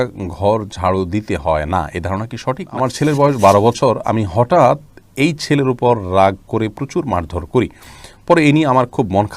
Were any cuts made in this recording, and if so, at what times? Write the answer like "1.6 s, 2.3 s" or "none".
2.7 s